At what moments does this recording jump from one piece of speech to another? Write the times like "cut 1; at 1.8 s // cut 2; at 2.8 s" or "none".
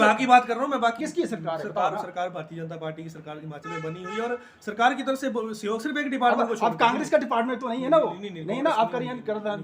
cut 1; at 1.0 s